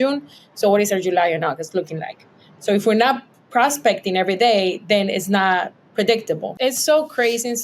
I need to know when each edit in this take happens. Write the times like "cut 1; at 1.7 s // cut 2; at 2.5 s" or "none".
cut 1; at 6.5 s